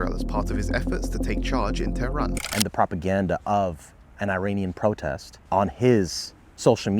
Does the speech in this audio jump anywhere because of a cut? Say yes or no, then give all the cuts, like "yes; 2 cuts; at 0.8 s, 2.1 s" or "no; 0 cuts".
yes; 2 cuts; at 2.4 s, 5.3 s